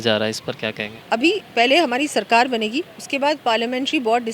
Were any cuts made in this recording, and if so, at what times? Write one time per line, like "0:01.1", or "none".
0:01.0